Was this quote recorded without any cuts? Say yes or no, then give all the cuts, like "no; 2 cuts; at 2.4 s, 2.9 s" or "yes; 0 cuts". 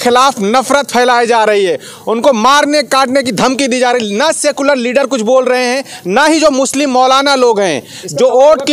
yes; 0 cuts